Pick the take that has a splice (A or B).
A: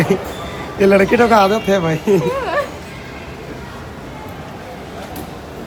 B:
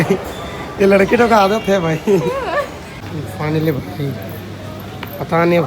B